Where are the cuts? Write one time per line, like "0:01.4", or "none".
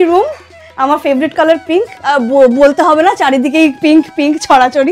none